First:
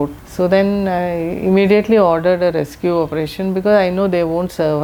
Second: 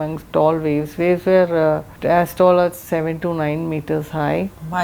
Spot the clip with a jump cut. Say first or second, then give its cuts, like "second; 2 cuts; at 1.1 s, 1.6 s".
second; 1 cut; at 1.9 s